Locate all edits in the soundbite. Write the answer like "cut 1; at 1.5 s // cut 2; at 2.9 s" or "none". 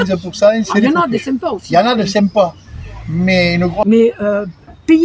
cut 1; at 3.8 s

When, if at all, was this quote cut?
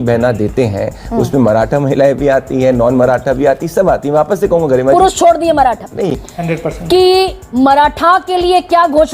cut 1; at 6.2 s

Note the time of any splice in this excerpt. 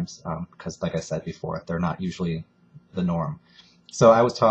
cut 1; at 2.5 s

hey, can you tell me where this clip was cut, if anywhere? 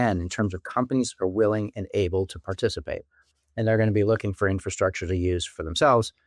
none

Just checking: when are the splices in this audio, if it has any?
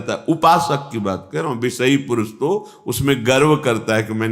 none

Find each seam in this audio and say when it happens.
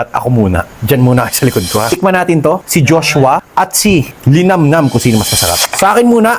cut 1; at 1.9 s

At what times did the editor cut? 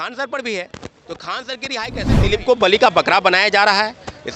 cut 1; at 2.2 s

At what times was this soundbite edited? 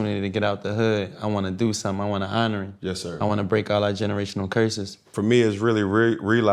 cut 1; at 5.1 s

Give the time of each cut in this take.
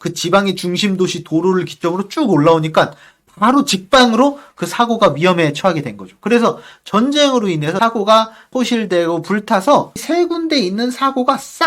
cut 1; at 7.8 s // cut 2; at 8.5 s // cut 3; at 10.0 s

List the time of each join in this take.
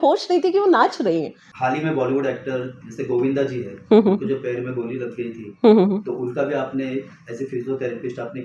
cut 1; at 1.4 s

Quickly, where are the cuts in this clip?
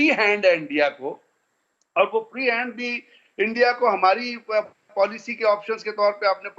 none

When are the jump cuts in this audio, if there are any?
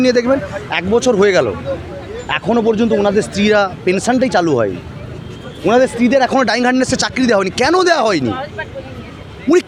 none

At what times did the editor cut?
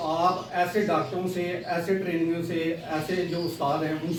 none

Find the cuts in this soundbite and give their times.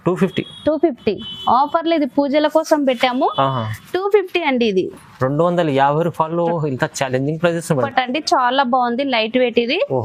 cut 1; at 7.9 s

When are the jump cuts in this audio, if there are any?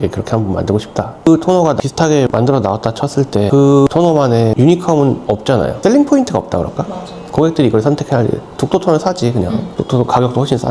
cut 1; at 1.3 s

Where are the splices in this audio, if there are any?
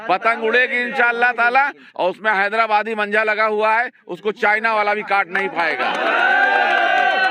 none

